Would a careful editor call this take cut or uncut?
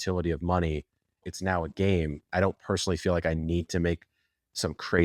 cut